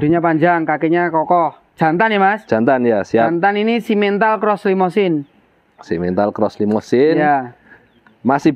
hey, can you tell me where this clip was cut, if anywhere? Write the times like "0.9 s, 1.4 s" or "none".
none